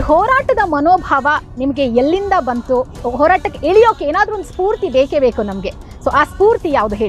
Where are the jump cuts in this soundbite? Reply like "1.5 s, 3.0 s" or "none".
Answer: 3.0 s